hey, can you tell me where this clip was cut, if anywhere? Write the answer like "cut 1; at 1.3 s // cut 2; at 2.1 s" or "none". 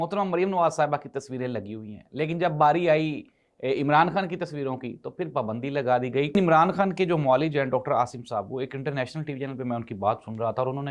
cut 1; at 6.3 s